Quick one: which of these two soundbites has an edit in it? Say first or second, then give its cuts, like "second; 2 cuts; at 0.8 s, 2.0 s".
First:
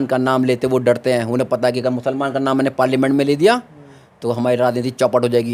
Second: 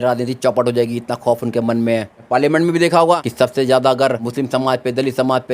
second; 3 cuts; at 2.2 s, 3.3 s, 4.3 s